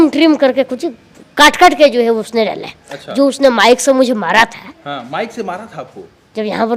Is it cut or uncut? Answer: uncut